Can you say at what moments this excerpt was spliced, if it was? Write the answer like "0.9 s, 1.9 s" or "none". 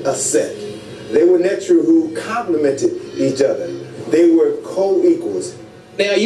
none